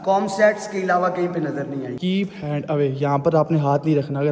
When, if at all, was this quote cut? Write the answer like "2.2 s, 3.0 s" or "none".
2.3 s